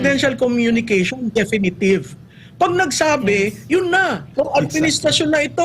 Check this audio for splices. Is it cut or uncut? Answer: cut